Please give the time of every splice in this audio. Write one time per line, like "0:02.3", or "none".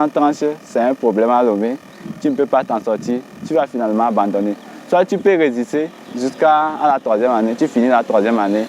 none